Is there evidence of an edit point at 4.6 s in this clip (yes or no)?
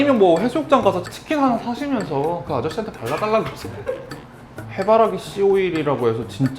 yes